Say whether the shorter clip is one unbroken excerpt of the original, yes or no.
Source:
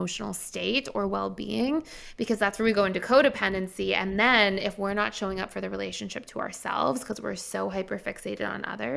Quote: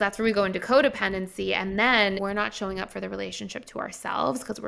no